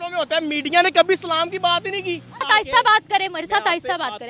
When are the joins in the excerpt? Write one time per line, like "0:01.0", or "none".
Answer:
0:02.4

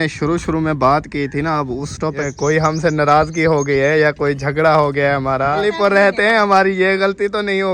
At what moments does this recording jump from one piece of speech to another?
0:02.2
0:05.7

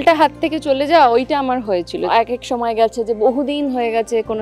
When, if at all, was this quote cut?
0:02.1

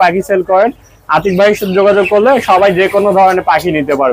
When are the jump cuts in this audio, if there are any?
none

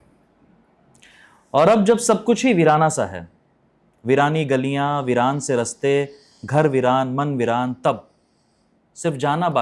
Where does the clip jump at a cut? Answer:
none

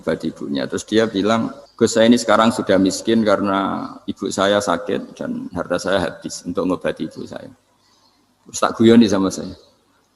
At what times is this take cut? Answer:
0:01.6

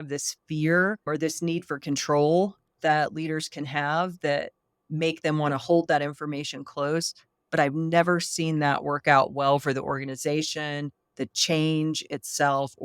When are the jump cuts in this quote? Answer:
0:01.1

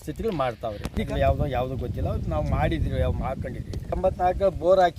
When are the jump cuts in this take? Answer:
0:01.1

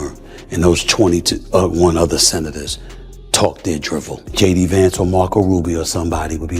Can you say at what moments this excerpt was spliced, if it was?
0:04.3

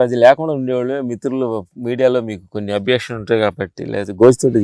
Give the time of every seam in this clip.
none

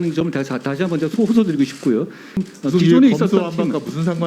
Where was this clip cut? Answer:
0:02.4

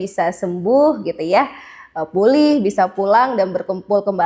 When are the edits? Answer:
none

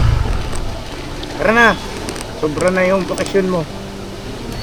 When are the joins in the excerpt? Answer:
none

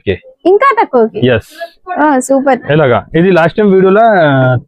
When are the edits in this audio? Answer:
none

